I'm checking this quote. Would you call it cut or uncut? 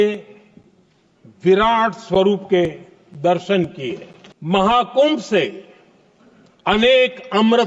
cut